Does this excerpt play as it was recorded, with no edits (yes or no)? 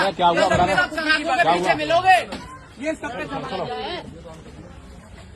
yes